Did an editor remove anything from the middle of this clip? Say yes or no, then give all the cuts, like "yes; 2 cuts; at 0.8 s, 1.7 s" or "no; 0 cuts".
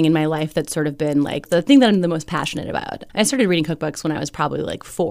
yes; 2 cuts; at 1.4 s, 3.0 s